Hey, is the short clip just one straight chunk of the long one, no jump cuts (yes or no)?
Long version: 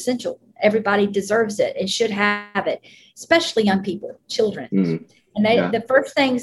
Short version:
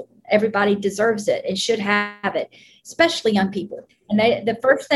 no